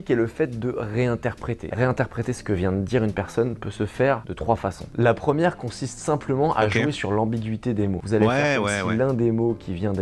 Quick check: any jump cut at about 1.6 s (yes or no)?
yes